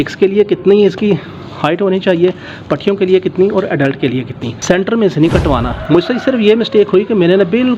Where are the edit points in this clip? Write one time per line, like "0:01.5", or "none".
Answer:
0:04.5